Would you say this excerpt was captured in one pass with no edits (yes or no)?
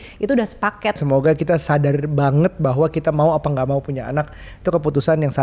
no